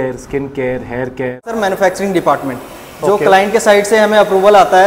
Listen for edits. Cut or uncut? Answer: cut